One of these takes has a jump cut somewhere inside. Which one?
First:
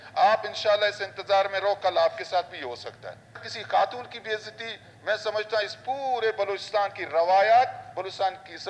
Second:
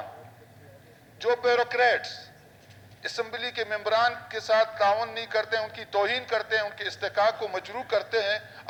first; 1 cut; at 3.5 s

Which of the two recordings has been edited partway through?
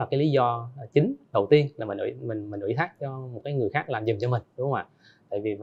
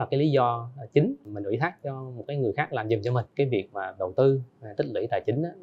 second; 2 cuts; at 1.2 s, 3.3 s

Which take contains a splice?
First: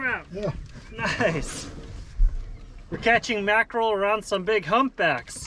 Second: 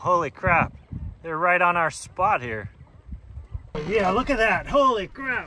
second; 1 cut; at 3.7 s

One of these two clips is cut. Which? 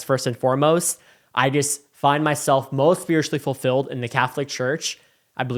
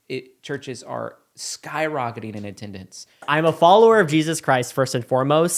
second; 1 cut; at 3.2 s

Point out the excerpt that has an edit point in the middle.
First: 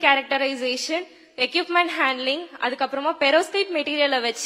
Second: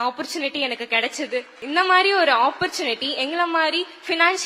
second; 1 cut; at 1.5 s

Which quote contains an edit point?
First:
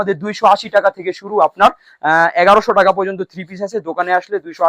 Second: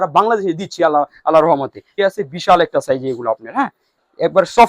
second; 1 cut; at 1.9 s

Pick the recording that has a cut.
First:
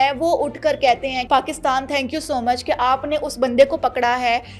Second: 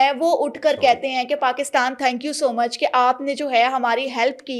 first; 1 cut; at 1.2 s

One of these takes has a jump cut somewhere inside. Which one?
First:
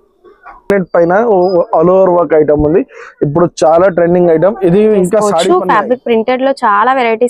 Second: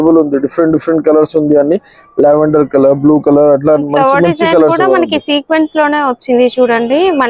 first; 1 cut; at 5.3 s

